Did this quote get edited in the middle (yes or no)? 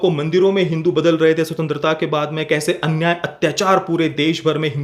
no